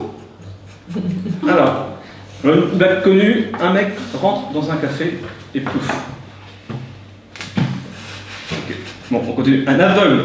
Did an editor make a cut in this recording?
no; 0 cuts

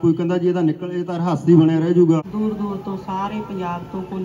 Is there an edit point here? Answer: yes; 1 cut; at 2.3 s

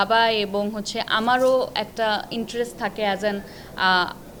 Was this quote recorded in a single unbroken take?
yes; 0 cuts

